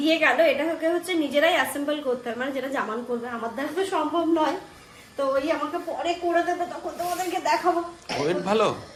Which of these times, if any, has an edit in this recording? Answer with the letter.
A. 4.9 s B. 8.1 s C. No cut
C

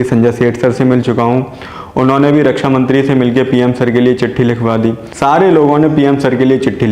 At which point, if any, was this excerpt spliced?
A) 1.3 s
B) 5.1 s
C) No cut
B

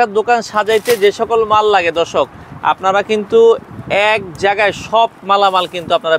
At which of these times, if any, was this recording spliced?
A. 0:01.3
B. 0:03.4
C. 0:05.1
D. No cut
D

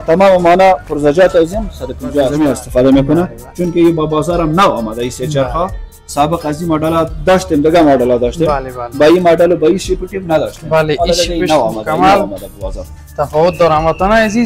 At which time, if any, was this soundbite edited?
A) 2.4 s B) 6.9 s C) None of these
A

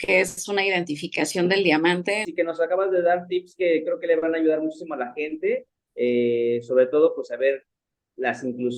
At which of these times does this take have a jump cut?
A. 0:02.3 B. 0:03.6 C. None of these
A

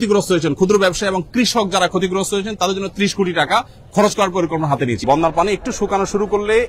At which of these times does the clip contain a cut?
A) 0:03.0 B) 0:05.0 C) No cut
B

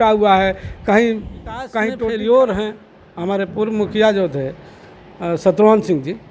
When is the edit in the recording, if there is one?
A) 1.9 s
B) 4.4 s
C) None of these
A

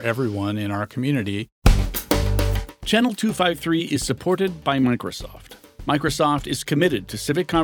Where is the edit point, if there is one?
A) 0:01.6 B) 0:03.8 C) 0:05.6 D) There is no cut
A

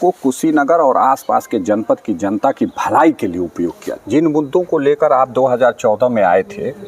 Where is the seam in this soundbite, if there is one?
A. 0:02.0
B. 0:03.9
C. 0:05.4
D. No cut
B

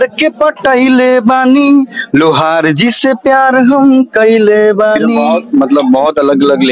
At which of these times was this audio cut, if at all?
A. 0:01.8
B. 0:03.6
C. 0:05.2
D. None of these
C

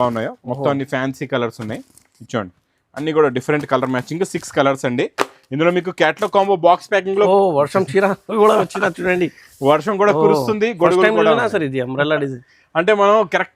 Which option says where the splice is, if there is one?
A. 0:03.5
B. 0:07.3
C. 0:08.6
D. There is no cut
B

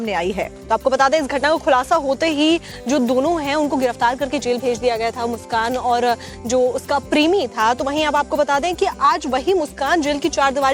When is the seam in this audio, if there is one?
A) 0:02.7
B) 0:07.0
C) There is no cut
C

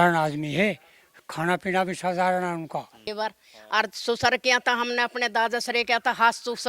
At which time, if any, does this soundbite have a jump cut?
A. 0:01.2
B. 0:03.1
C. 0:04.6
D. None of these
B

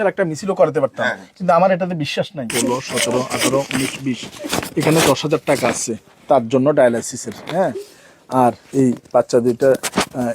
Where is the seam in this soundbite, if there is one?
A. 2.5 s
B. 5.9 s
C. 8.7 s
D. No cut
A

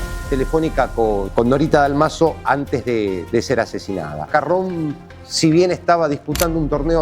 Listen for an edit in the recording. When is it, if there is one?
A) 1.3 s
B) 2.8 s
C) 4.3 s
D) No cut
C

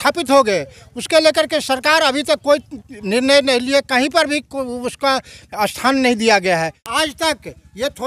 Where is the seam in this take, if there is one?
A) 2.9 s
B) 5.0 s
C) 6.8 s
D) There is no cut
C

